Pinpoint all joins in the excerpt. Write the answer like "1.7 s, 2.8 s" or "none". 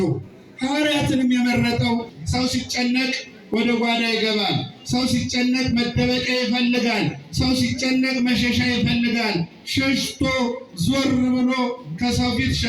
2.2 s

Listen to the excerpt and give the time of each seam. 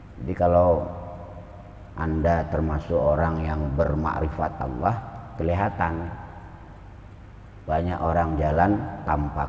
none

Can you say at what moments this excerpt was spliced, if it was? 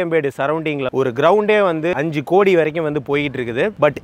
0.9 s, 1.9 s

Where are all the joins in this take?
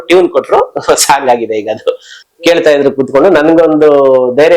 2.1 s

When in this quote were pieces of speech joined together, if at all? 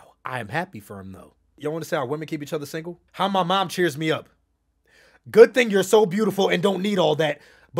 1.6 s, 3.0 s

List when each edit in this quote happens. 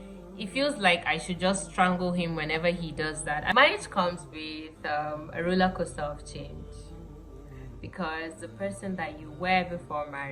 3.5 s

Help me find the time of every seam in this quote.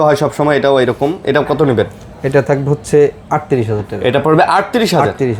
none

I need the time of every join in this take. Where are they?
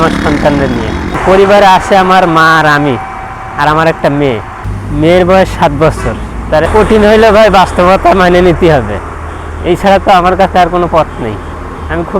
1.2 s, 4.6 s, 6.6 s

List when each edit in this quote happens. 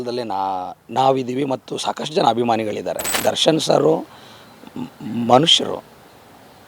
3.1 s

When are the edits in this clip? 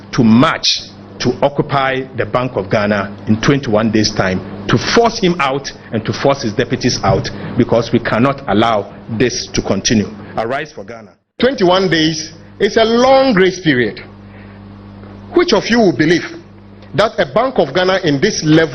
11.4 s

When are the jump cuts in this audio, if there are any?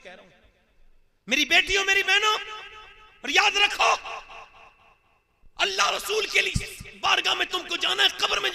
none

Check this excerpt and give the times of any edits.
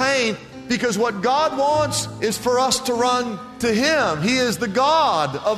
2.0 s

